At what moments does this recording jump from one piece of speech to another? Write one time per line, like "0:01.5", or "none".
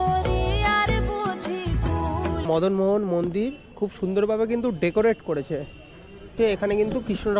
0:02.4